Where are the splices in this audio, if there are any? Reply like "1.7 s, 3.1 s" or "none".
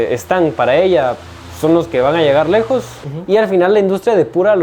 3.0 s